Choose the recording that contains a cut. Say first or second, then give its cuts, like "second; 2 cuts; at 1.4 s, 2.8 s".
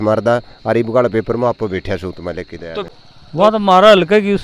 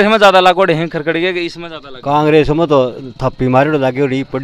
first; 1 cut; at 2.9 s